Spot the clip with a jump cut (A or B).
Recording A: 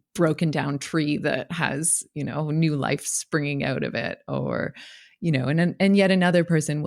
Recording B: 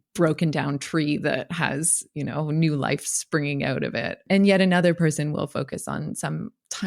B